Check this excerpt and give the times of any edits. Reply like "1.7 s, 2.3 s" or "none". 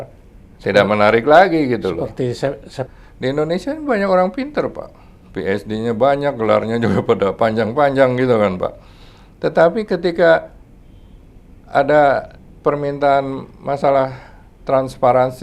2.8 s